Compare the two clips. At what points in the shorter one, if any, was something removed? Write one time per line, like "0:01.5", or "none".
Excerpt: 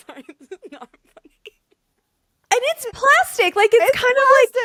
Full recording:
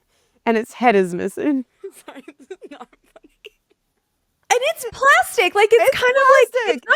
none